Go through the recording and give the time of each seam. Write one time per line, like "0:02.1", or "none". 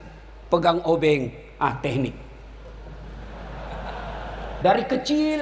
none